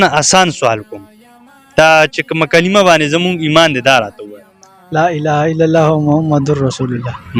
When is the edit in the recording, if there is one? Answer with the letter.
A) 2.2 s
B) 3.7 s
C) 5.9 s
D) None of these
D